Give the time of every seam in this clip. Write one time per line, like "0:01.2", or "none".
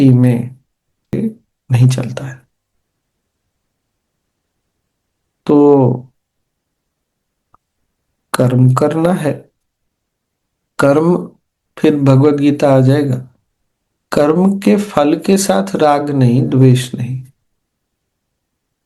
0:01.1